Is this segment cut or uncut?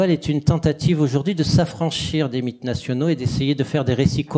uncut